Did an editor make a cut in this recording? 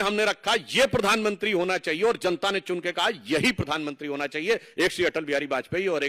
no; 0 cuts

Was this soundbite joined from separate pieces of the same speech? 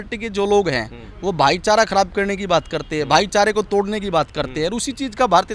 no; 0 cuts

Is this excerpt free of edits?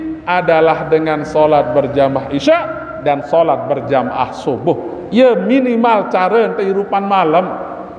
yes; 0 cuts

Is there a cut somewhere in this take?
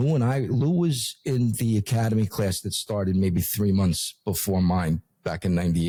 no; 0 cuts

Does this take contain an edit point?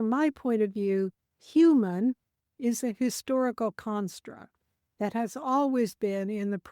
no; 0 cuts

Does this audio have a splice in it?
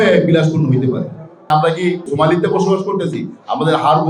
yes; 1 cut; at 1.8 s

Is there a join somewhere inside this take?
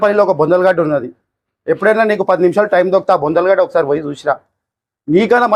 no; 0 cuts

